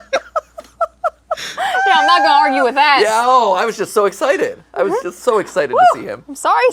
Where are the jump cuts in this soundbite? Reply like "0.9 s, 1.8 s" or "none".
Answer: none